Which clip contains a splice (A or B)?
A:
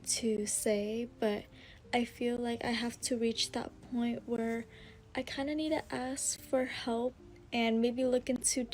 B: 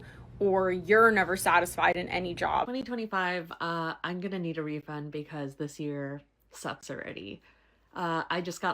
B